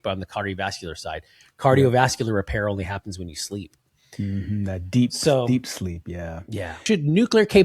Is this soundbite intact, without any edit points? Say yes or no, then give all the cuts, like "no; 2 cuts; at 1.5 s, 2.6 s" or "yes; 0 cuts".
no; 1 cut; at 6.7 s